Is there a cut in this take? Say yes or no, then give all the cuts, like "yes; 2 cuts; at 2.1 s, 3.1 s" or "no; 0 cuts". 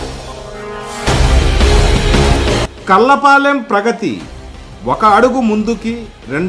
no; 0 cuts